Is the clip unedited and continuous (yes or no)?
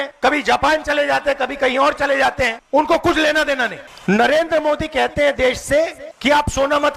no